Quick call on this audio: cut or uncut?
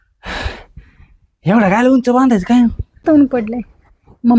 cut